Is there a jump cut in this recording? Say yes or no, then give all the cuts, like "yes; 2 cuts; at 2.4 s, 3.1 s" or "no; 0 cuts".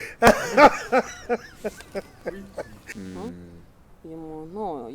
yes; 1 cut; at 2.9 s